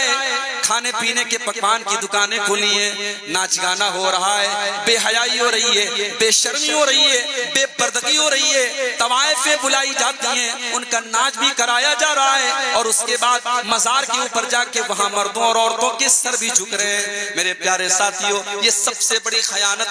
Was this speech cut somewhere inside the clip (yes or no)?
no